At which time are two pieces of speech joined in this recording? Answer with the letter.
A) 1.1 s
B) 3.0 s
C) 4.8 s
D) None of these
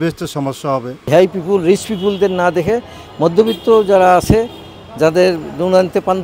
A